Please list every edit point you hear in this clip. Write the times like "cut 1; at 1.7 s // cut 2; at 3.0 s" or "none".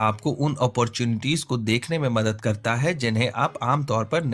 none